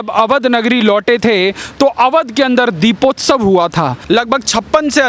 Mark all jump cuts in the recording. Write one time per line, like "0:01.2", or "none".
0:04.0